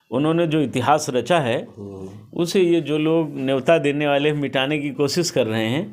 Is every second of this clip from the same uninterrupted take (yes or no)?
yes